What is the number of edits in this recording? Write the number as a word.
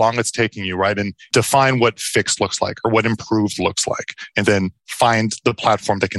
one